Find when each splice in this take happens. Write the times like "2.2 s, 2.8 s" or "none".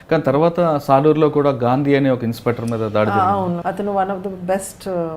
3.6 s